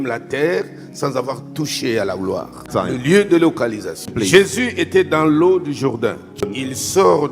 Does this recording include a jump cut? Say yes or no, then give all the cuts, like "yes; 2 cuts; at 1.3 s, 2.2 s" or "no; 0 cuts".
yes; 3 cuts; at 2.7 s, 4.1 s, 6.4 s